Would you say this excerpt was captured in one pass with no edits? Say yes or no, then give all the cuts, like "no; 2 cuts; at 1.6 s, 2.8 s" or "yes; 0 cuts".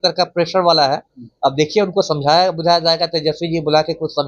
yes; 0 cuts